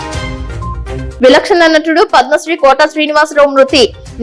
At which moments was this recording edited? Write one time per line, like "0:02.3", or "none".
0:01.1